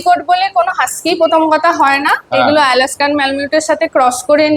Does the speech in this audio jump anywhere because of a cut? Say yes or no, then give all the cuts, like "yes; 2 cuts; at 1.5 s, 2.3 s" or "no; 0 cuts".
no; 0 cuts